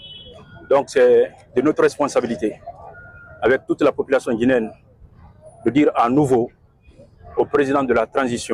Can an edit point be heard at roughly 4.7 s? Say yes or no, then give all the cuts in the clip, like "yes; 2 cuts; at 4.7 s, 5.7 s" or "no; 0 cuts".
no; 0 cuts